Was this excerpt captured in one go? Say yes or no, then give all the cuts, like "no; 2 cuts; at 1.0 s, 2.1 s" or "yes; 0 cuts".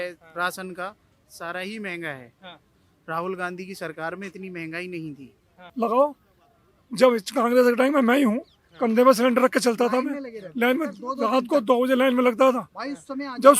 no; 1 cut; at 5.6 s